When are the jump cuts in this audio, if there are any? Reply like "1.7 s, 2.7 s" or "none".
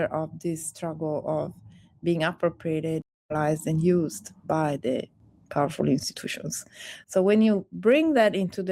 3.1 s